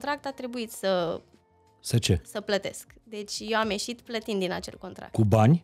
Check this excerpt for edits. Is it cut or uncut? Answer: uncut